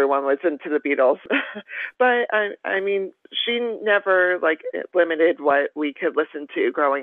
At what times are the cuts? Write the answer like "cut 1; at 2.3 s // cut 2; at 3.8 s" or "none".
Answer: cut 1; at 1.2 s